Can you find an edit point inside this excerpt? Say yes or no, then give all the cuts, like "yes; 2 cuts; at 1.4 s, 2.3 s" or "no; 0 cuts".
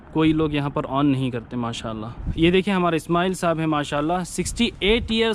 yes; 1 cut; at 2.1 s